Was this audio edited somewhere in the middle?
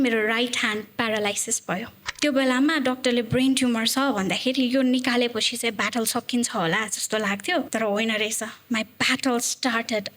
yes; 2 cuts; at 2.0 s, 7.7 s

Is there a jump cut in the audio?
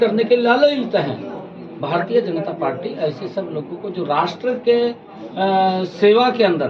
no; 0 cuts

